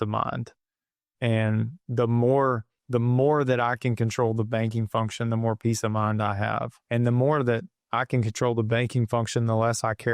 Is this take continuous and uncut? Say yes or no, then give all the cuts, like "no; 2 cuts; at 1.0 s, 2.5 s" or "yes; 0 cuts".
no; 2 cuts; at 2.7 s, 6.8 s